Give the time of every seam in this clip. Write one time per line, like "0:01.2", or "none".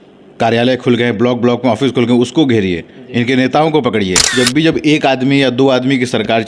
0:04.2